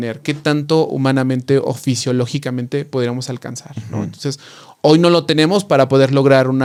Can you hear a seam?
no; 0 cuts

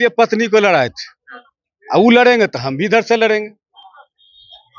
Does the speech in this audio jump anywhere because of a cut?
no; 0 cuts

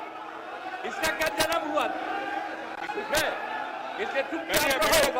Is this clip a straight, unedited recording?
yes; 0 cuts

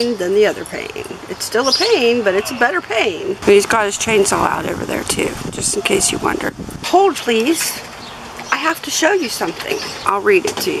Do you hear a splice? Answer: yes; 3 cuts; at 3.4 s, 6.8 s, 9.9 s

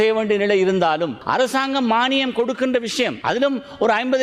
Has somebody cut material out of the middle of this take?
yes; 2 cuts; at 1.2 s, 3.2 s

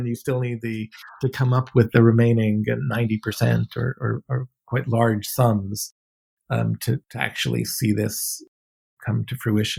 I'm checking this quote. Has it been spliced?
no; 0 cuts

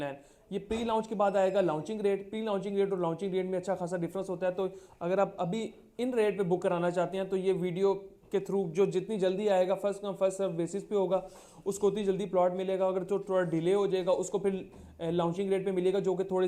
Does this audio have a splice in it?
no; 0 cuts

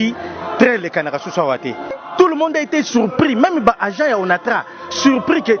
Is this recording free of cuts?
no; 1 cut; at 1.9 s

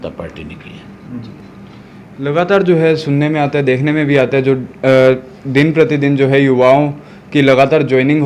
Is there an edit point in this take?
no; 0 cuts

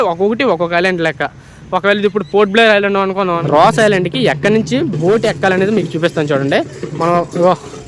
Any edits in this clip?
yes; 1 cut; at 3.4 s

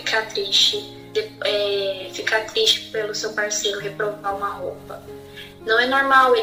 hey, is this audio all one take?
yes; 0 cuts

